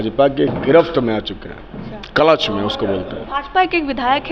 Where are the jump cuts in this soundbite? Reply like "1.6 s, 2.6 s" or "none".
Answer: 3.2 s